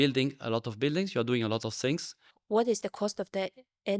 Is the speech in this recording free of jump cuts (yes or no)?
no